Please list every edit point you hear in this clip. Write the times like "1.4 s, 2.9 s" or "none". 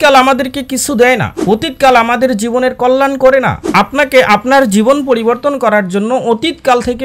none